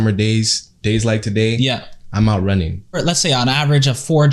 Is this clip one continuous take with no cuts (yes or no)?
no